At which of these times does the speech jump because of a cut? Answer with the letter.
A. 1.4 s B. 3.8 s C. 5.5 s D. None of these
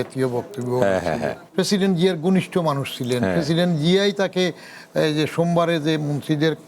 A